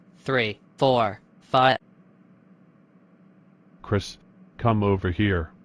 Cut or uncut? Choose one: cut